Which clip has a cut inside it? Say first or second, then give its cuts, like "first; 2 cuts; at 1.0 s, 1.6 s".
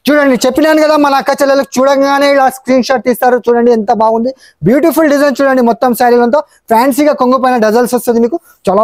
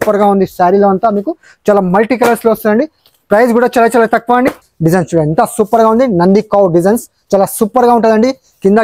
second; 1 cut; at 4.7 s